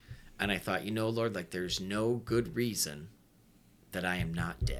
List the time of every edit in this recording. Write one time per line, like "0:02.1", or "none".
none